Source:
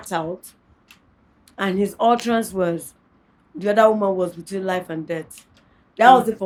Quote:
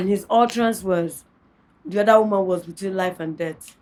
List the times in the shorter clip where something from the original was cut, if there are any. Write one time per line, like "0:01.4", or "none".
none